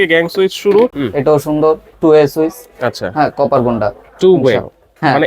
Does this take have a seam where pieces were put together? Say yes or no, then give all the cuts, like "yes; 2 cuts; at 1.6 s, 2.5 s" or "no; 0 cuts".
yes; 1 cut; at 1.0 s